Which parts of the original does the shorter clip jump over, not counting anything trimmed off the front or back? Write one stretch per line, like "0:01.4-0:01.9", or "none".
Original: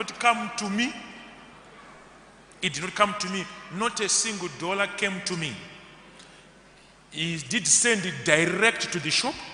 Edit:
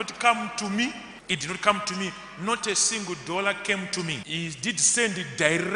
0:01.1-0:02.4
0:05.6-0:07.1